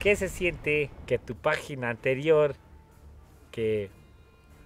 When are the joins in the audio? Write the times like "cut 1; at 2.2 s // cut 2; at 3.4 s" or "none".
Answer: cut 1; at 1.0 s